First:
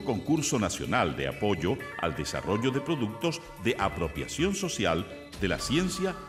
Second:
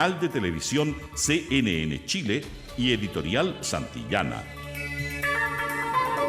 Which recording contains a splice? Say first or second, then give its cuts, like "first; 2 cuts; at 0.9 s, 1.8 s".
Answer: second; 1 cut; at 4.4 s